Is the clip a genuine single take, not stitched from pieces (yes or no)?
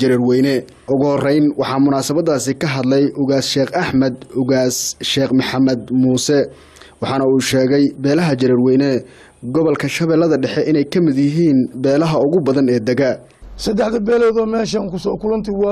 no